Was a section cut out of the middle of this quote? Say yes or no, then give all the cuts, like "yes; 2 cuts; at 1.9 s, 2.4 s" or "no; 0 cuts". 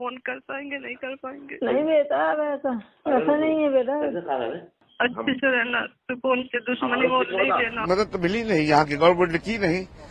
yes; 1 cut; at 7.8 s